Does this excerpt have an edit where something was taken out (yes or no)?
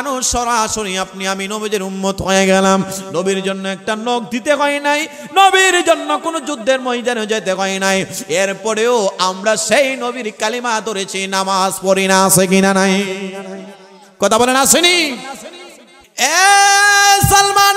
yes